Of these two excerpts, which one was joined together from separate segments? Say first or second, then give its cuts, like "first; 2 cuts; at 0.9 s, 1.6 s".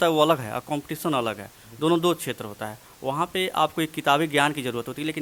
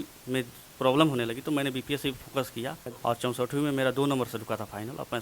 second; 1 cut; at 2.8 s